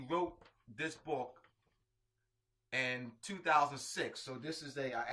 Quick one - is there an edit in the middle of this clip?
no; 0 cuts

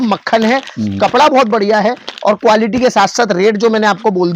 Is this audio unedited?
yes; 0 cuts

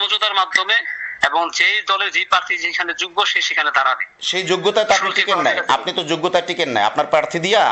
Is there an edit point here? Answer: no; 0 cuts

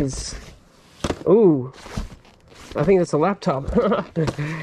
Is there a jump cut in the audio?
no; 0 cuts

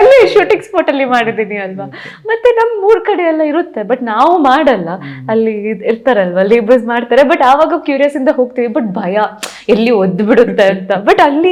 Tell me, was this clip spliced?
no; 0 cuts

